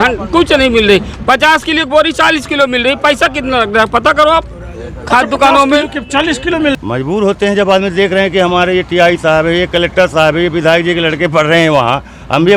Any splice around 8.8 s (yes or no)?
no